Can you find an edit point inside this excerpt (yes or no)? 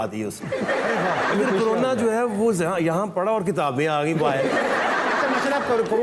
no